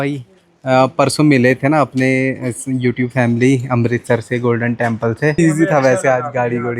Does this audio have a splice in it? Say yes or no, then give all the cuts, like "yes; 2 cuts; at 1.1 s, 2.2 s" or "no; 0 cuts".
yes; 1 cut; at 5.4 s